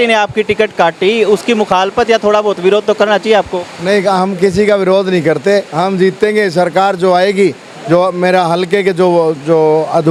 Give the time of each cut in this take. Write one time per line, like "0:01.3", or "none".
none

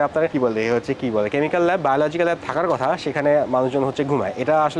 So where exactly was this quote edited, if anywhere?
none

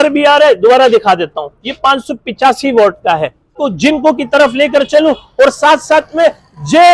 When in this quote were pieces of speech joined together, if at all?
0:03.6

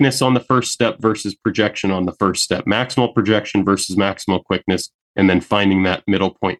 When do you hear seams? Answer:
none

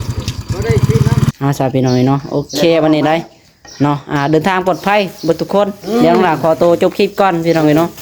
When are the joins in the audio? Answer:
0:01.3

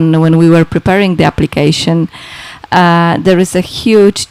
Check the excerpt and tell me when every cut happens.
none

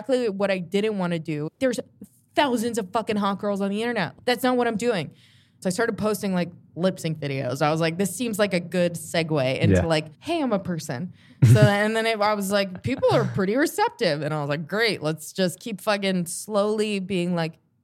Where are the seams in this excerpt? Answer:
0:01.6
0:05.6

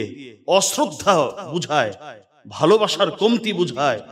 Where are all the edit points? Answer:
none

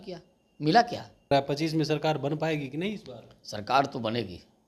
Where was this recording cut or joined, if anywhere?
0:01.3

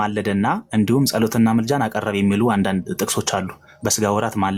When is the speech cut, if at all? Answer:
none

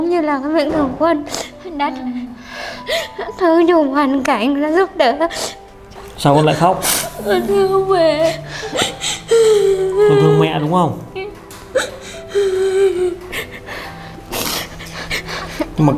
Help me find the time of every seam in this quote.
0:06.0

